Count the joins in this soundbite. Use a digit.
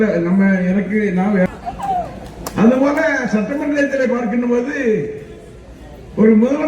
1